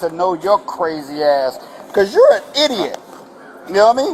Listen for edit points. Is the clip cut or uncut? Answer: uncut